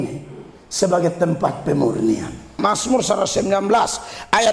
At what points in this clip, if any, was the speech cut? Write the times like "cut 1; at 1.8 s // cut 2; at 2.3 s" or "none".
cut 1; at 2.5 s